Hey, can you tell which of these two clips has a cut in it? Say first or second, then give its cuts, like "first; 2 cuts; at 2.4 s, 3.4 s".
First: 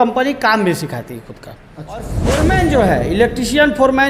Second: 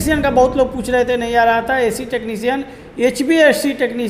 first; 1 cut; at 2.1 s